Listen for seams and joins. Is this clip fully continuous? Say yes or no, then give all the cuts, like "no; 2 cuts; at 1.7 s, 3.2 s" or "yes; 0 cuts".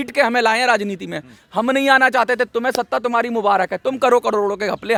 yes; 0 cuts